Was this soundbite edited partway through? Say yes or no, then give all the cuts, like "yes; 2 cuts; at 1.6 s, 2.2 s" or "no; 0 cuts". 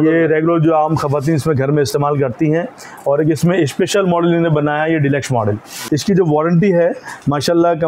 yes; 1 cut; at 5.7 s